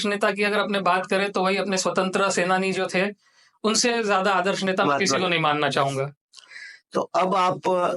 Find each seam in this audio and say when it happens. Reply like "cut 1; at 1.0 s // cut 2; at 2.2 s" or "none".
none